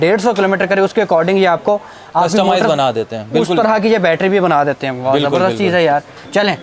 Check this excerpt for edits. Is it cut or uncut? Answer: uncut